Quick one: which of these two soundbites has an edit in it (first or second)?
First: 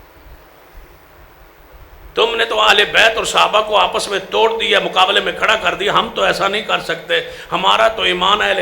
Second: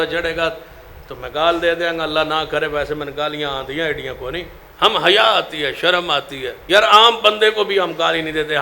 second